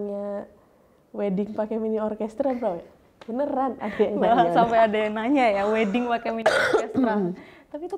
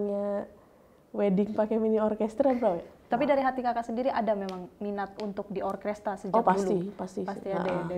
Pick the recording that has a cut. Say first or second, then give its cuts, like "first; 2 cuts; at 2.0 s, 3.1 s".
second; 1 cut; at 2.9 s